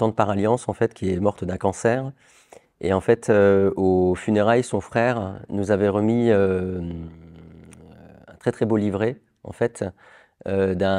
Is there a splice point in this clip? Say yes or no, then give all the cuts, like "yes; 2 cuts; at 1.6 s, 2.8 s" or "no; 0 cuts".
no; 0 cuts